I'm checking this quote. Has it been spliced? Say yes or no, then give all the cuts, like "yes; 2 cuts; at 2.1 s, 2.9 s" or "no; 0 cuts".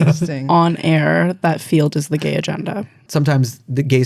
yes; 1 cut; at 3.0 s